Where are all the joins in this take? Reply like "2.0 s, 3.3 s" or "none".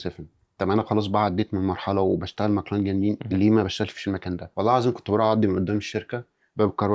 3.2 s, 4.4 s